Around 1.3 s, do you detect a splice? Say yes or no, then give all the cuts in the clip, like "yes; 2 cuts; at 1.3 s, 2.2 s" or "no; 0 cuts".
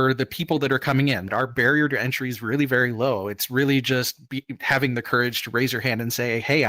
yes; 1 cut; at 1.3 s